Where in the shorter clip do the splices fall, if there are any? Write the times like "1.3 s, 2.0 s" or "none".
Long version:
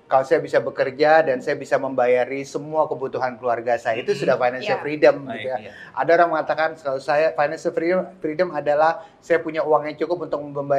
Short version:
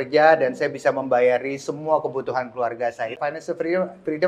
3.2 s